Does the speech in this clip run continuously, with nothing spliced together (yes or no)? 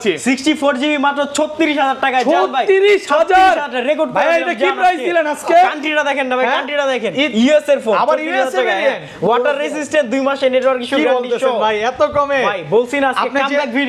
yes